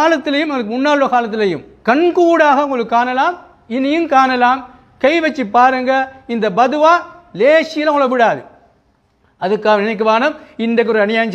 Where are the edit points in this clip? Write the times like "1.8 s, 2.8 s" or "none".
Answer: 1.7 s